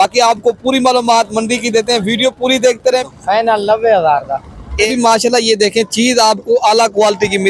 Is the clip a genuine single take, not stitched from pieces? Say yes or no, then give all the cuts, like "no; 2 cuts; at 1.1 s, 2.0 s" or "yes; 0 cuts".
no; 2 cuts; at 3.0 s, 4.9 s